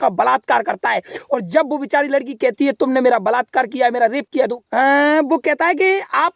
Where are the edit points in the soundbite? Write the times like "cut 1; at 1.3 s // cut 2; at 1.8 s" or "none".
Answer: cut 1; at 4.6 s